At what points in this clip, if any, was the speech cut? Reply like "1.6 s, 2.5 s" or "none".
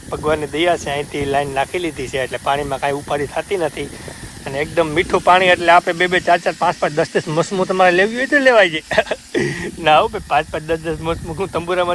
none